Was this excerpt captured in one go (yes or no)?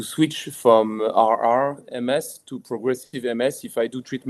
yes